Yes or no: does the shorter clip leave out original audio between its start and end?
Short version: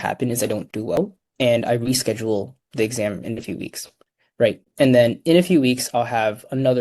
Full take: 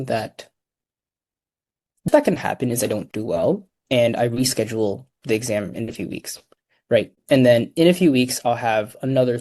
yes